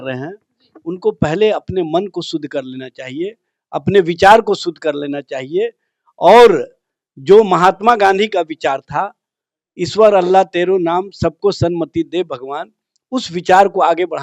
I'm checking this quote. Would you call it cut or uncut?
uncut